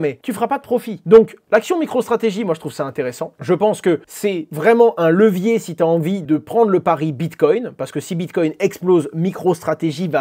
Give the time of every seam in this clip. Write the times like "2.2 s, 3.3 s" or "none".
none